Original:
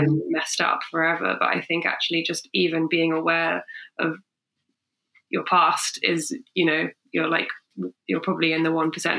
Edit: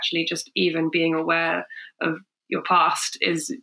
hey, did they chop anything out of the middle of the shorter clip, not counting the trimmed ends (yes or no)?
yes